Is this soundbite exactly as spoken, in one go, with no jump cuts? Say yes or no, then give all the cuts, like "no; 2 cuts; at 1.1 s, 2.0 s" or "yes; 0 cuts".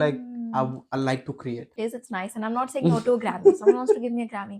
no; 1 cut; at 1.7 s